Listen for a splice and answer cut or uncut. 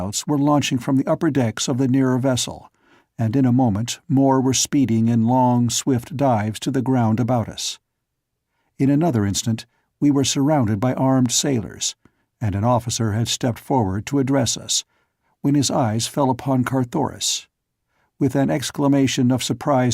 cut